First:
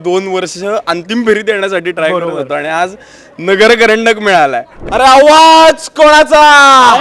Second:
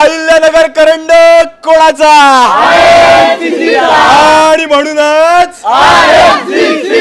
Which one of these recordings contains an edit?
first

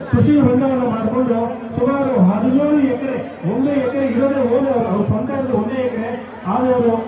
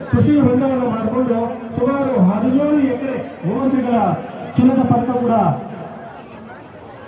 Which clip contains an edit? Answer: second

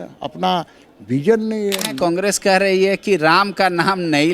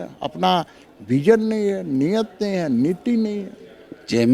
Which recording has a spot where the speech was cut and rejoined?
first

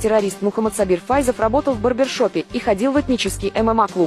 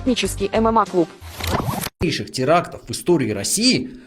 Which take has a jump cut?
second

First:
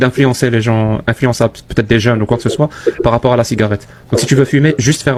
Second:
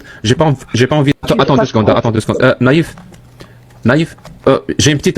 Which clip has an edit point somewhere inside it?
second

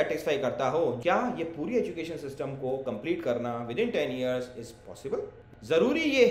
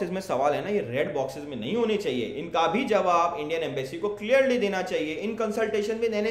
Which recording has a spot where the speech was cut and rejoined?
first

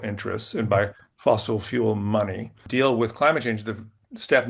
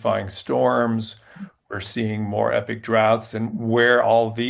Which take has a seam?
first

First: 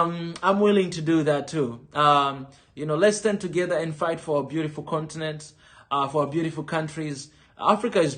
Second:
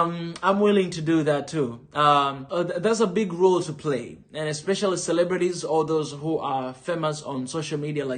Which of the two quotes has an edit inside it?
second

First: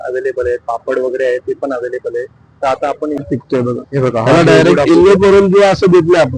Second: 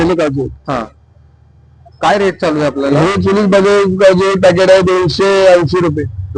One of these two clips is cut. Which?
first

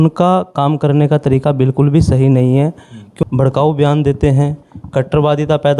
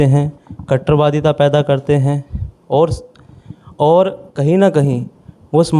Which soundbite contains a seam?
first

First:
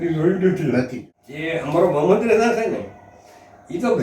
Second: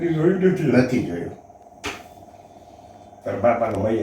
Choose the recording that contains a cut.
first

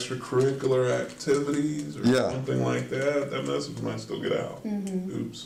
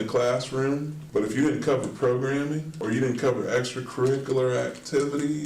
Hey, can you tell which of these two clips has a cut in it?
second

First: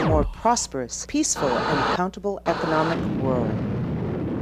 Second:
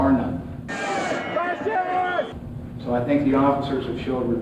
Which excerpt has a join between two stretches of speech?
first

